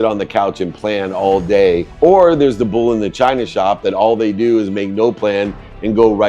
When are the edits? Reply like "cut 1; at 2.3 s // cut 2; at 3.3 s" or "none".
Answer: cut 1; at 1.9 s